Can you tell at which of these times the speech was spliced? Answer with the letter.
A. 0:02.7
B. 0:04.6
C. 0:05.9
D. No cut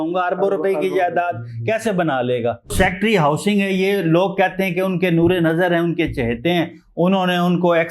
A